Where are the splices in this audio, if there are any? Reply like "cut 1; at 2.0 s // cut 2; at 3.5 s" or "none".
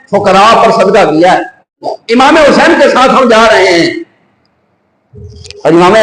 cut 1; at 1.9 s